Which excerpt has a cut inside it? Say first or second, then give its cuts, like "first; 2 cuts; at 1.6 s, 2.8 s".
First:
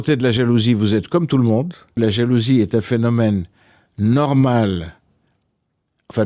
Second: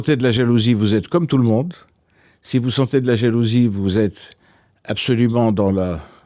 first; 1 cut; at 2.0 s